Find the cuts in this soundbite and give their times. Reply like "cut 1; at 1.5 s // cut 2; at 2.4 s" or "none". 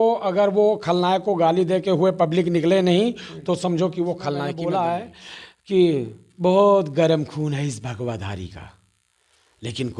cut 1; at 4.5 s

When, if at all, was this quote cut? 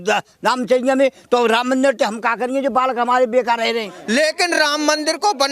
cut 1; at 3.9 s

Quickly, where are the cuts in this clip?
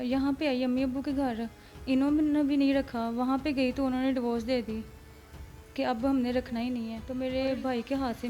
cut 1; at 6.9 s

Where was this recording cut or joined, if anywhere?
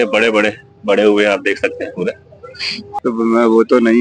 cut 1; at 3.0 s

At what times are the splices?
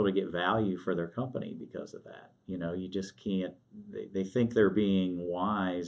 none

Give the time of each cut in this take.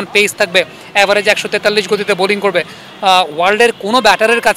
none

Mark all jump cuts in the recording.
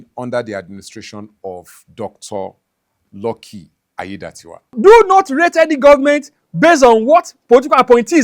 cut 1; at 4.7 s

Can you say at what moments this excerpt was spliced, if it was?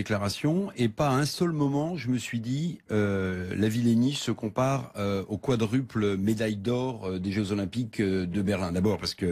cut 1; at 2.8 s

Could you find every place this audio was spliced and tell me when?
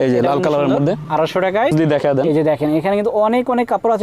cut 1; at 1.7 s

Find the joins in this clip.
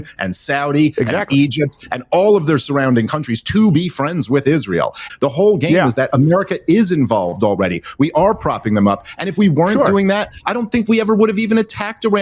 cut 1; at 5.0 s

